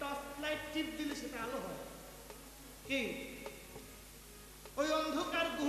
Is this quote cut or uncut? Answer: uncut